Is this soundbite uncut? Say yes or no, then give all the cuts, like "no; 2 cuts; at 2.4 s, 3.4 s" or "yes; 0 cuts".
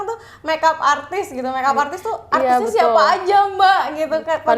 yes; 0 cuts